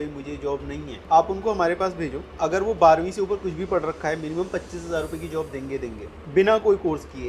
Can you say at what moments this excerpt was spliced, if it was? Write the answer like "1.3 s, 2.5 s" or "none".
6.1 s